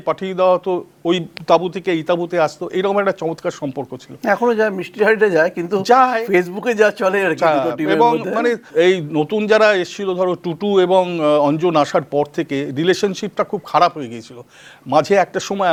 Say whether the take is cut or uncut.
uncut